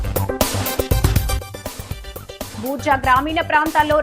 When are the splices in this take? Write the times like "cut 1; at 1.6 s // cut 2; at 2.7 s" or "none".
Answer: cut 1; at 2.5 s